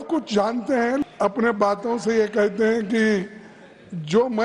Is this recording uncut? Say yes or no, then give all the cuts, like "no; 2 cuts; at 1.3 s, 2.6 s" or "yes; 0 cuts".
no; 1 cut; at 1.0 s